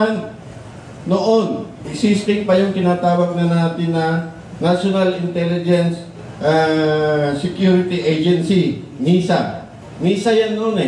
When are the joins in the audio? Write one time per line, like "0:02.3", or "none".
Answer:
none